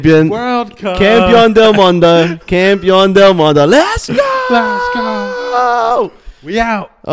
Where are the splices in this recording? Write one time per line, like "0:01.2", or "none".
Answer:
none

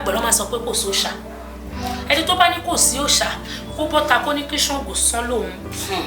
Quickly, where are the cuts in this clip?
none

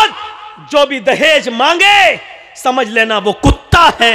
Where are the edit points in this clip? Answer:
none

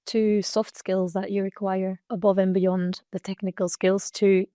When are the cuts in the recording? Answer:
0:02.0

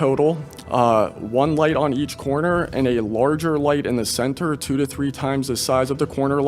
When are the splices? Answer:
none

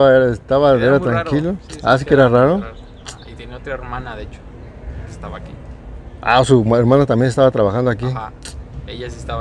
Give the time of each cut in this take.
none

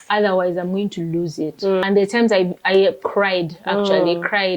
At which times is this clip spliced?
0:01.8

